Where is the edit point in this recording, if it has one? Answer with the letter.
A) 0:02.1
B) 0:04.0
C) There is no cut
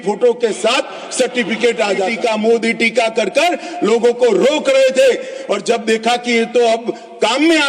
A